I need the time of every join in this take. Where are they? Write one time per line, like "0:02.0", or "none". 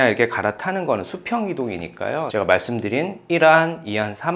0:02.3